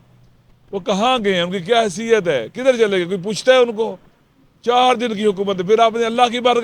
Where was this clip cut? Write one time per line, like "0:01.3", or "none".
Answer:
none